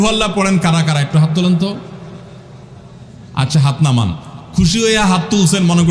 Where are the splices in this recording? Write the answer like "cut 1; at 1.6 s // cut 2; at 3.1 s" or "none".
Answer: none